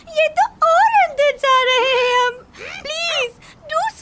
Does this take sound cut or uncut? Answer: uncut